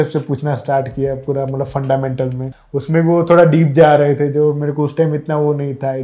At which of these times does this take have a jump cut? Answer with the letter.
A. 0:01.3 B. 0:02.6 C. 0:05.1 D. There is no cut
B